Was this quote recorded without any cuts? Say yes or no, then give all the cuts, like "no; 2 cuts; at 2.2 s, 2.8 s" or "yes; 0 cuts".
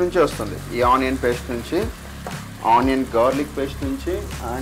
yes; 0 cuts